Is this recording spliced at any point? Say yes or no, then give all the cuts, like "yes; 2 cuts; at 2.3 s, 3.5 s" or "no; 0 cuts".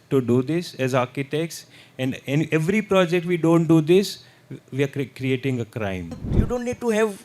yes; 1 cut; at 6.2 s